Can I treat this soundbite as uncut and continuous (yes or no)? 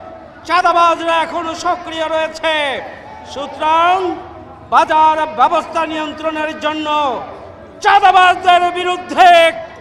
yes